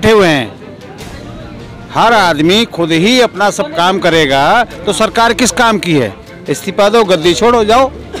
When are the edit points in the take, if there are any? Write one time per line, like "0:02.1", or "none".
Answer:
none